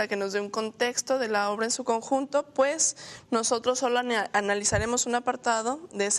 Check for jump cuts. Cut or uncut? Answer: cut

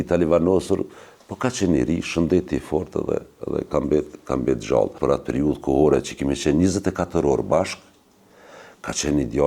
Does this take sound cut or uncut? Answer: cut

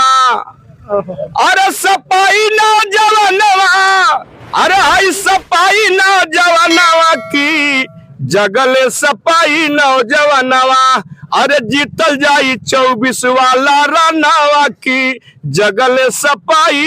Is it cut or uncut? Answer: uncut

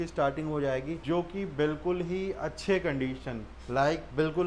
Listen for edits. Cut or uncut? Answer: uncut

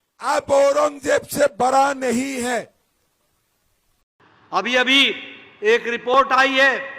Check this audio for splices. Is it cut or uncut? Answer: cut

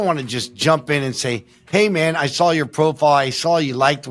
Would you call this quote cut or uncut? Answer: uncut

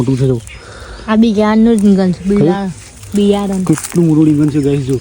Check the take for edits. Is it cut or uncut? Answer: uncut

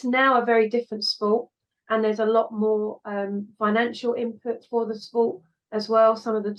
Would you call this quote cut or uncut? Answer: uncut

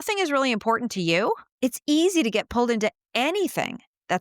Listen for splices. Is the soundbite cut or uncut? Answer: cut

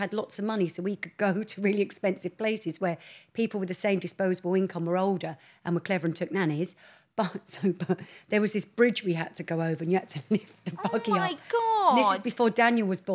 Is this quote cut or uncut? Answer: uncut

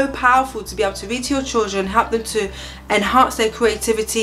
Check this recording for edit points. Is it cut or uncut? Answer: uncut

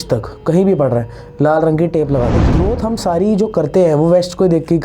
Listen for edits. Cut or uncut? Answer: cut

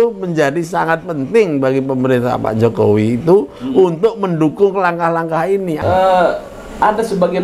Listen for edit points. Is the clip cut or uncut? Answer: cut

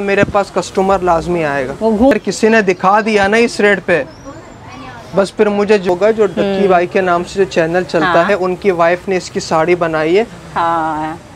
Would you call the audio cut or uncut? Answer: cut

